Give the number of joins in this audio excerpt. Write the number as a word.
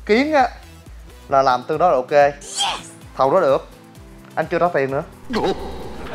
one